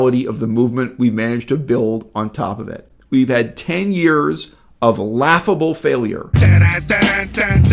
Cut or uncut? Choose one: cut